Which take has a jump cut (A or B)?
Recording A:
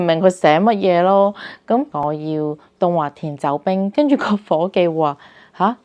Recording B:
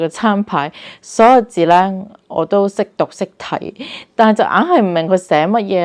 A